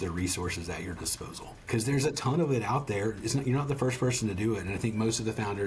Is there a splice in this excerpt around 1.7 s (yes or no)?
yes